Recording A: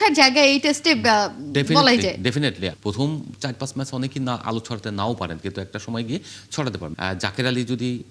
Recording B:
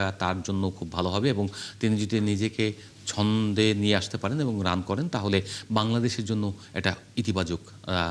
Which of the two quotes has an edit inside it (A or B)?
A